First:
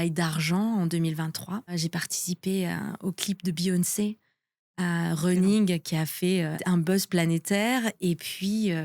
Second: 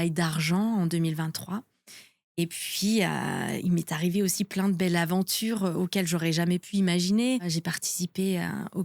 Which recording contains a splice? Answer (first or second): first